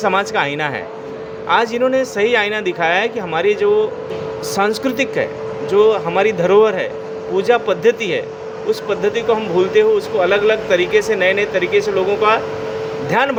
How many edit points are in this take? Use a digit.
0